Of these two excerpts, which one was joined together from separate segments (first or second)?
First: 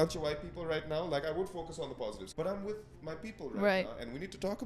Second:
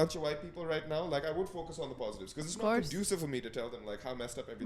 first